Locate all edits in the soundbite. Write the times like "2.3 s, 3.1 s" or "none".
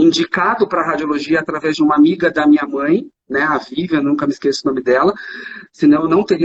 none